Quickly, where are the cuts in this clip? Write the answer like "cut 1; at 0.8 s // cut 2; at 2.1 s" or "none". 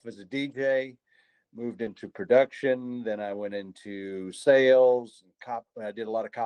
none

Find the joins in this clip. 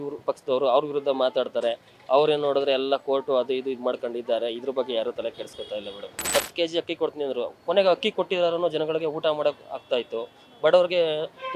cut 1; at 6.4 s

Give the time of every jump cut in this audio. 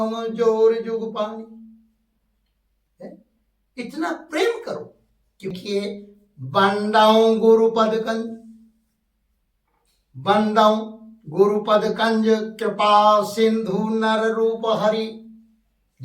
cut 1; at 5.6 s

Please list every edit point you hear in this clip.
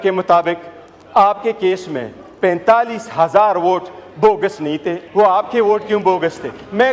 cut 1; at 5.0 s

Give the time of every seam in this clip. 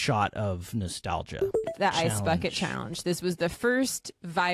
cut 1; at 1.6 s

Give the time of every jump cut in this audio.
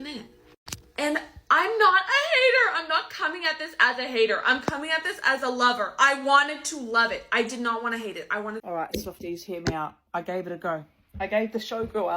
cut 1; at 8.6 s

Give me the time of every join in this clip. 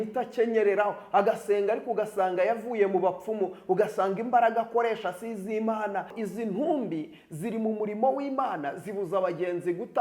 cut 1; at 6.1 s

